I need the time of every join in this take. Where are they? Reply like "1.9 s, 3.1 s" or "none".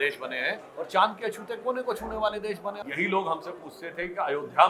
2.8 s